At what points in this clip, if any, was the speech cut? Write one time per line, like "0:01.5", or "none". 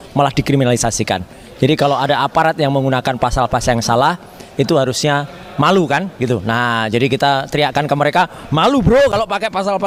none

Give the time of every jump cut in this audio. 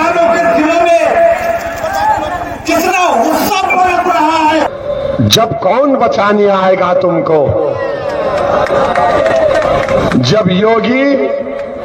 0:04.7

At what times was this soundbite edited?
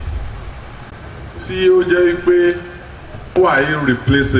0:00.9
0:03.4

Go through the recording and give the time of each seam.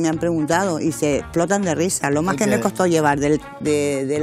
none

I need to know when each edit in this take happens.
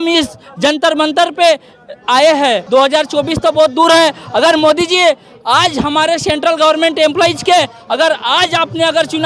0:02.6

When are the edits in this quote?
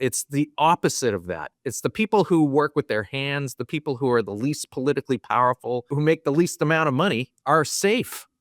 0:05.9
0:07.3

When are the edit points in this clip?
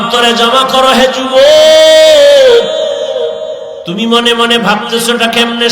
0:03.8

